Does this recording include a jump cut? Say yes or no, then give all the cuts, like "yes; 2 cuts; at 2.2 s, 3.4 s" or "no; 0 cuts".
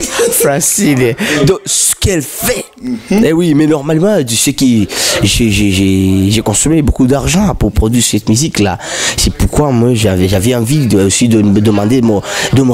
no; 0 cuts